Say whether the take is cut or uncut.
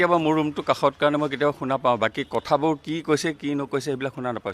uncut